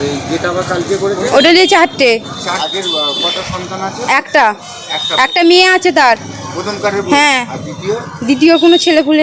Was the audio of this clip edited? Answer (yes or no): yes